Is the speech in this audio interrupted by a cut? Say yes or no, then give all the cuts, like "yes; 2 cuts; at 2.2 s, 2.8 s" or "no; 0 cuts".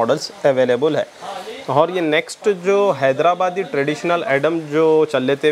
no; 0 cuts